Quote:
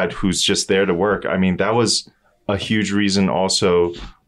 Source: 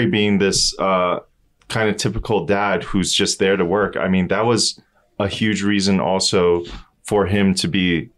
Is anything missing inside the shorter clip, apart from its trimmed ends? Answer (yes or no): no